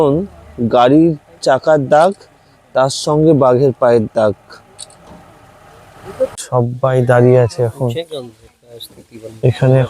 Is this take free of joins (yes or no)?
no